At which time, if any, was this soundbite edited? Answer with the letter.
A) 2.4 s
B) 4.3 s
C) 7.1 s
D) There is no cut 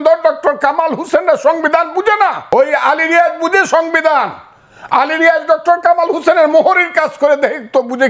A